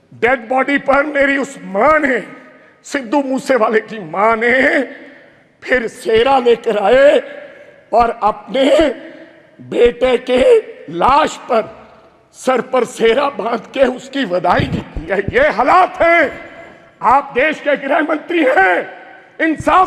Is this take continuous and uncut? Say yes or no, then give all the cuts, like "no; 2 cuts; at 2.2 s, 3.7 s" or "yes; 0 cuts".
yes; 0 cuts